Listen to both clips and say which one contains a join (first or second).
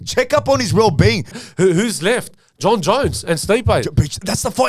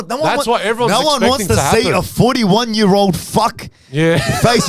first